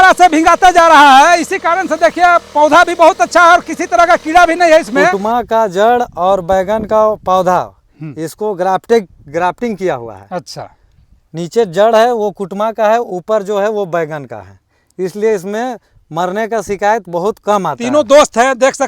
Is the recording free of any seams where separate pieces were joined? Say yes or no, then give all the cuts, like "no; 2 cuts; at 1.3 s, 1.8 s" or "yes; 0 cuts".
no; 2 cuts; at 5.2 s, 17.8 s